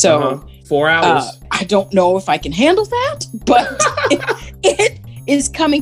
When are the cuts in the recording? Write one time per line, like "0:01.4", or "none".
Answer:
0:01.6